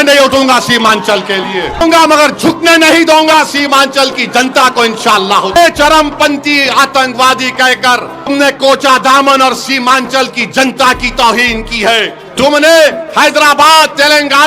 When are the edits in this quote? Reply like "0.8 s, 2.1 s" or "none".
1.8 s, 5.6 s, 8.3 s, 12.2 s